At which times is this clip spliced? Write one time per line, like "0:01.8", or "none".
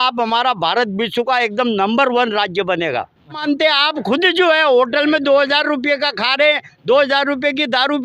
0:03.4

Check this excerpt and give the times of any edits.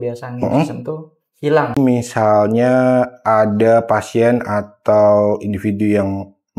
0:01.8

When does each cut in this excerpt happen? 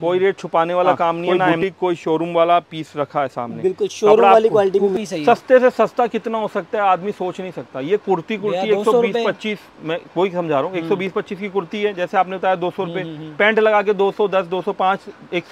0:01.2
0:05.0

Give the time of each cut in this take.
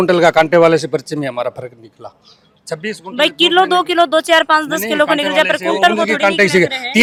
none

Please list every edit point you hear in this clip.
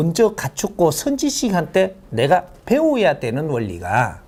none

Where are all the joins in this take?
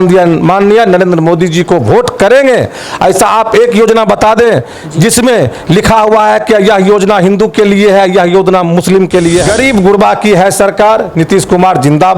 0:09.5

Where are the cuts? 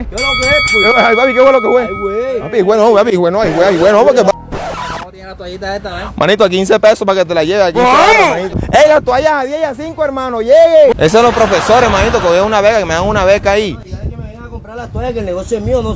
0:04.3
0:08.5
0:10.9

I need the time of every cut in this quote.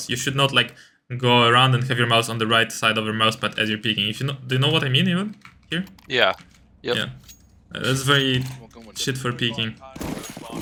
none

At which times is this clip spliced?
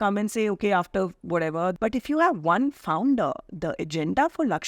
0:01.8

